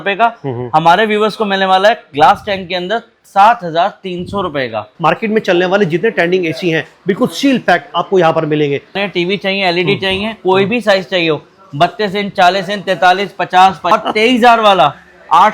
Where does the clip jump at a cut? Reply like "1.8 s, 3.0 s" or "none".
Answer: 4.9 s, 9.0 s, 13.9 s